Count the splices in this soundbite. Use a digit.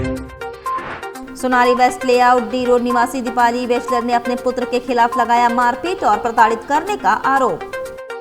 1